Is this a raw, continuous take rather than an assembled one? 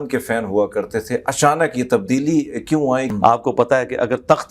no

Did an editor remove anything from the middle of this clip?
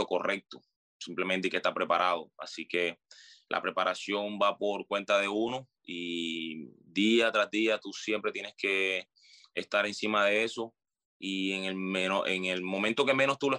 no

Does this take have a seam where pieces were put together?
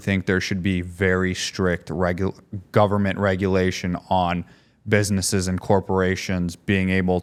no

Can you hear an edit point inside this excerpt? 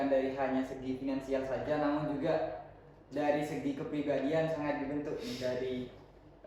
no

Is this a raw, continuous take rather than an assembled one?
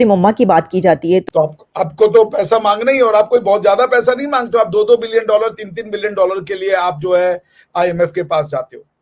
no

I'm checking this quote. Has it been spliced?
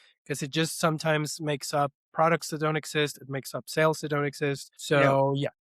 yes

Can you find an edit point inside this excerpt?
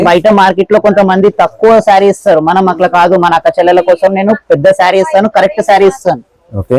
no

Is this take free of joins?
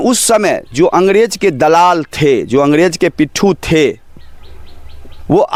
yes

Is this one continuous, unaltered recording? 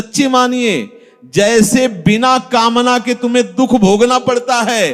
yes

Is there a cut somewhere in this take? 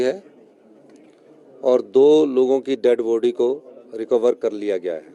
no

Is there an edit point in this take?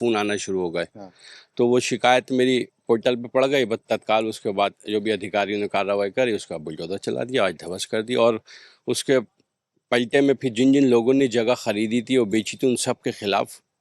no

